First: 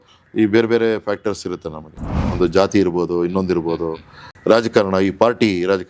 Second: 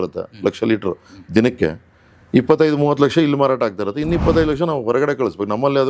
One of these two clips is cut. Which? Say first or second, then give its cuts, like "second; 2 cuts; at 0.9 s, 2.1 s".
first; 1 cut; at 4.3 s